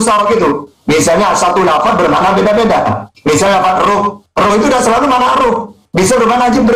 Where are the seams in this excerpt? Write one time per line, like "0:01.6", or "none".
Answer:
none